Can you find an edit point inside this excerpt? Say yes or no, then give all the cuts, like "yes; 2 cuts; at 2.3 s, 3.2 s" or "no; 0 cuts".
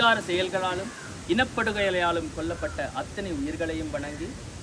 no; 0 cuts